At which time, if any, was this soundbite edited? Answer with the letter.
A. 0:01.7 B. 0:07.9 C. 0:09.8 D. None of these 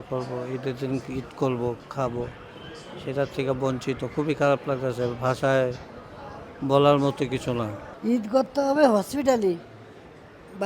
B